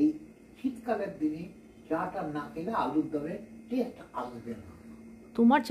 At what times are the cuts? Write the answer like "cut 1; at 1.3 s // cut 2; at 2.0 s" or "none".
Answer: none

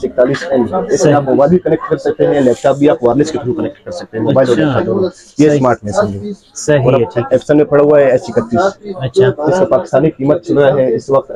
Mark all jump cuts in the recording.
none

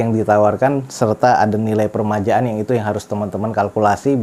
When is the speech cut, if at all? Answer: none

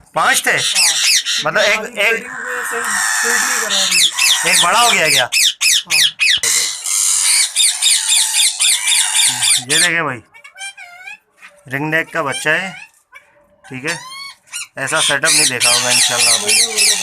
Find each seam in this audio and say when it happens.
cut 1; at 6.4 s

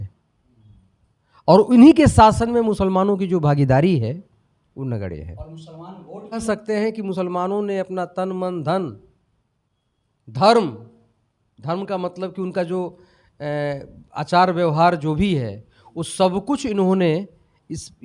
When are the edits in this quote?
cut 1; at 6.4 s

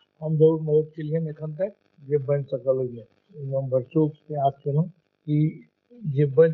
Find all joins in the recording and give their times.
cut 1; at 1.9 s // cut 2; at 5.1 s

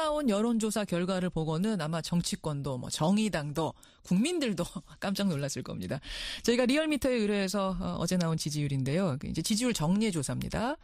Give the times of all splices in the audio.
cut 1; at 8.8 s

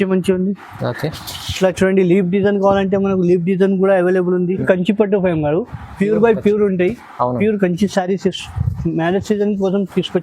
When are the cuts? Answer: cut 1; at 4.6 s

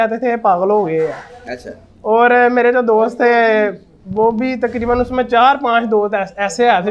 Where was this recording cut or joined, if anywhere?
none

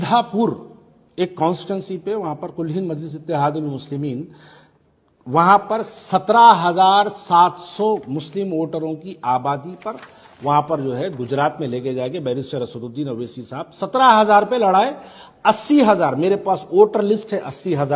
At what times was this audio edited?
none

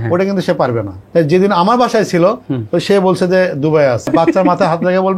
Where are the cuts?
cut 1; at 1.0 s // cut 2; at 4.1 s

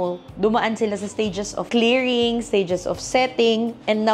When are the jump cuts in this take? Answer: none

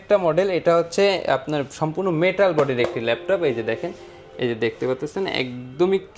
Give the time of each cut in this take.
none

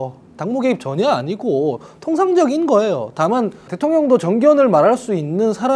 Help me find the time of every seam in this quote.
cut 1; at 3.7 s

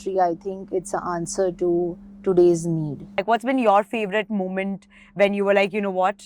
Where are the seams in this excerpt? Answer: cut 1; at 3.2 s

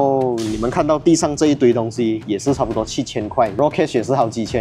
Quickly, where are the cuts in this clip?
cut 1; at 3.6 s

